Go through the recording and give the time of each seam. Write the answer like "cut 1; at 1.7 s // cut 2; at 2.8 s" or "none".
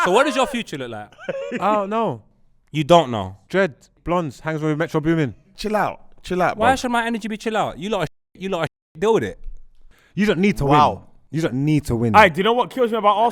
cut 1; at 5.6 s